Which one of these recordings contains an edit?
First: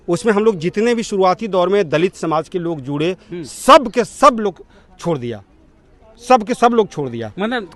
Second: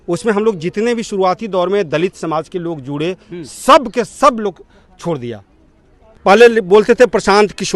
second; 1 cut; at 6.1 s

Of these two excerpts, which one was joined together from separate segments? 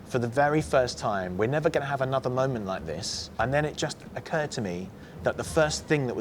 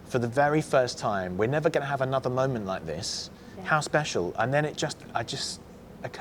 first; 3 cuts; at 3.3 s, 4.0 s, 5.0 s

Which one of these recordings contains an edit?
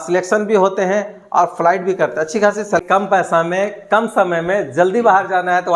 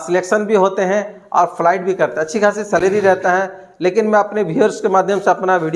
first; 1 cut; at 2.8 s

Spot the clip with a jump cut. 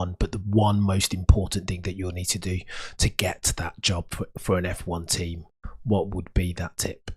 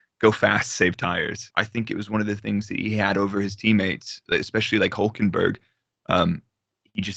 second; 1 cut; at 1.4 s

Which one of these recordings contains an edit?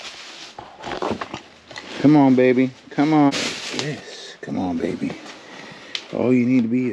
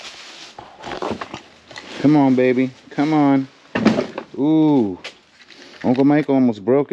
first; 1 cut; at 3.3 s

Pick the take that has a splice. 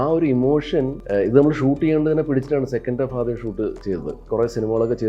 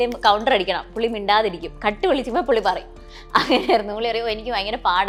first; 2 cuts; at 1.0 s, 4.2 s

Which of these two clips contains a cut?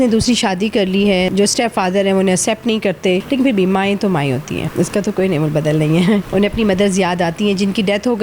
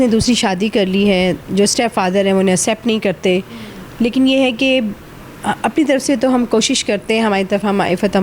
first; 4 cuts; at 1.3 s, 3.2 s, 4.7 s, 6.3 s

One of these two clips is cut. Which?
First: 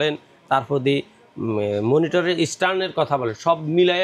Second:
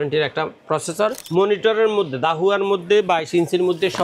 second; 1 cut; at 1.2 s

